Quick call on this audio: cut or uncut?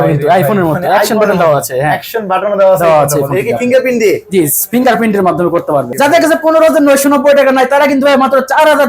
cut